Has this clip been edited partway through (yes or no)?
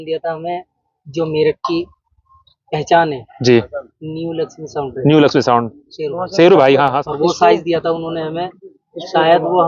yes